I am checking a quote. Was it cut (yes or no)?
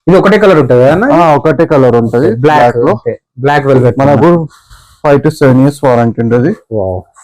no